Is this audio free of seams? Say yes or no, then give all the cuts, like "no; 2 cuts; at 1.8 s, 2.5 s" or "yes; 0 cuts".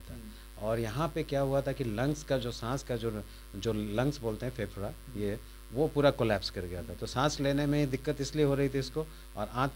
yes; 0 cuts